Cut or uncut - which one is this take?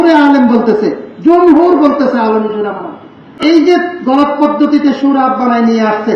cut